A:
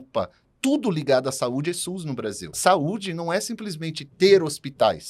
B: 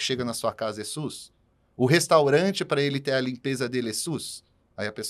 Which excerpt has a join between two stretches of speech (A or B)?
A